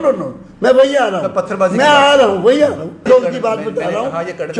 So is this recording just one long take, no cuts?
no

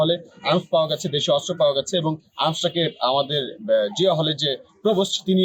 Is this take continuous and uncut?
yes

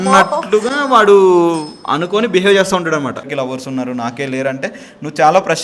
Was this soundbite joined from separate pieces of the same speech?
yes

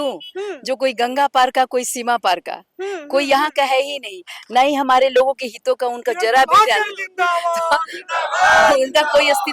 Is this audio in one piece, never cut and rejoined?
yes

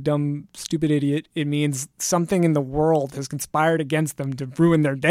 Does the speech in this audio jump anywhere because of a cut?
no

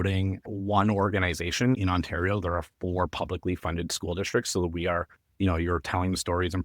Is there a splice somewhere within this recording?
yes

